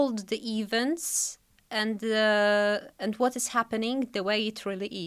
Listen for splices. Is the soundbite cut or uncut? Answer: uncut